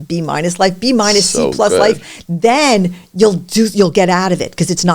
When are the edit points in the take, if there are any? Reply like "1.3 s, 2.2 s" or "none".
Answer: none